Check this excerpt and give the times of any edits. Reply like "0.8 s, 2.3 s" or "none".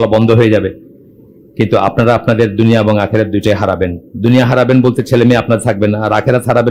none